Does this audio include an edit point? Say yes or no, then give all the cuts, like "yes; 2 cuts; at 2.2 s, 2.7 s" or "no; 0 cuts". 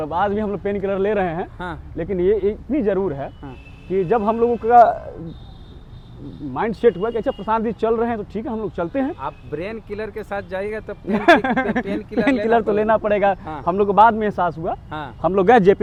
no; 0 cuts